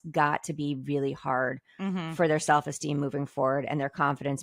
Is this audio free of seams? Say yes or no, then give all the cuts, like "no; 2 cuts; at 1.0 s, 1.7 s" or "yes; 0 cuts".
yes; 0 cuts